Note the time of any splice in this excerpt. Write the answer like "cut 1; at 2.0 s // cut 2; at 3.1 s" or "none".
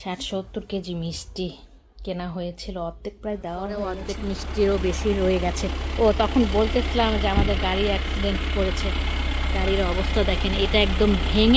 cut 1; at 4.1 s